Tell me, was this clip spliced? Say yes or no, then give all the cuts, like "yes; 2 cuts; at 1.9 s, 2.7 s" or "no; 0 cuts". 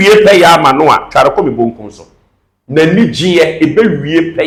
no; 0 cuts